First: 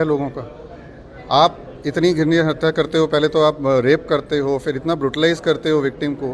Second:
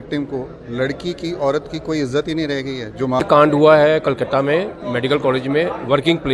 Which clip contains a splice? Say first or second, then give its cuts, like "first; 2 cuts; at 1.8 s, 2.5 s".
second; 1 cut; at 3.2 s